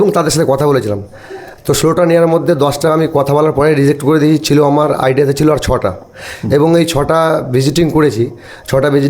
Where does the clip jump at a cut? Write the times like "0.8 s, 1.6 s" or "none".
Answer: none